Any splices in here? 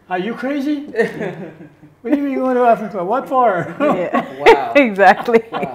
no; 0 cuts

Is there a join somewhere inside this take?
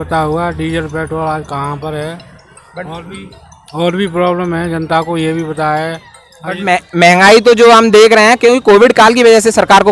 no; 0 cuts

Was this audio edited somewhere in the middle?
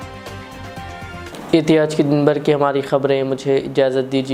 no; 0 cuts

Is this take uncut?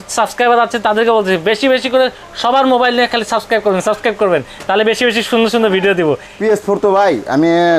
no; 1 cut; at 6.3 s

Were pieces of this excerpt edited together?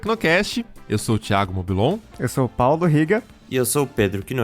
yes; 2 cuts; at 2.1 s, 3.4 s

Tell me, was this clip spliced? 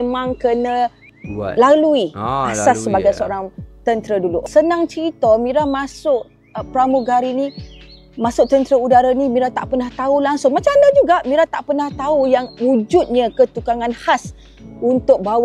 no; 0 cuts

